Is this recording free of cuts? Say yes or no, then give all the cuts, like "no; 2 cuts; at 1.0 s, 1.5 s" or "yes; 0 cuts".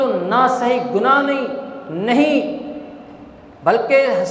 yes; 0 cuts